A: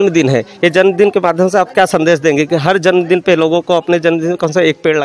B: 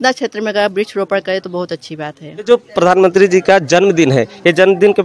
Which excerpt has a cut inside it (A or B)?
B